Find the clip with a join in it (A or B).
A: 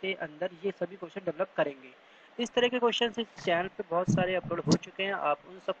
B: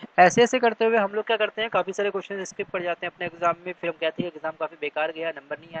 A